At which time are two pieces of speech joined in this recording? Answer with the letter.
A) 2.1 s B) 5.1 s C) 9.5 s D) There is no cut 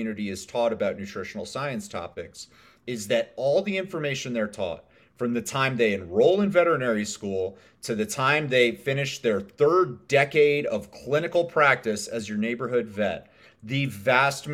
D